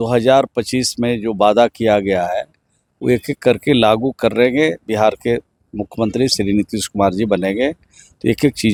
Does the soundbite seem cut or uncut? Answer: uncut